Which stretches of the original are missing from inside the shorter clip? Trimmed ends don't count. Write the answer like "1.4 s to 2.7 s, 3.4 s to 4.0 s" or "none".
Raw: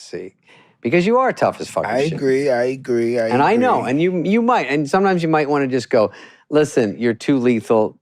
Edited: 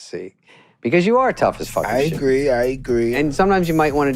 3.1 s to 4.7 s